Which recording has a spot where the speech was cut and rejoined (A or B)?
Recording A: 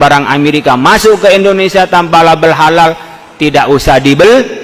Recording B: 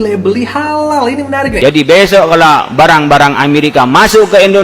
B